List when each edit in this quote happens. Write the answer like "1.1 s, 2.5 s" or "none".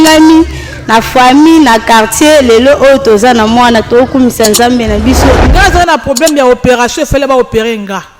5.4 s